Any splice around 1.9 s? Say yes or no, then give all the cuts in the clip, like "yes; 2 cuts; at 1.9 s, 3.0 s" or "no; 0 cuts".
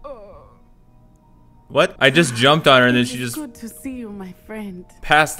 yes; 1 cut; at 1.9 s